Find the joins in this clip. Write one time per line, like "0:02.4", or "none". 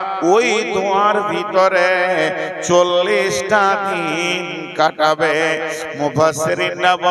0:05.3